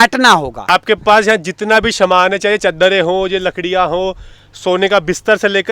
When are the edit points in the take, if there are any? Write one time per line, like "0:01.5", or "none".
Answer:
0:01.0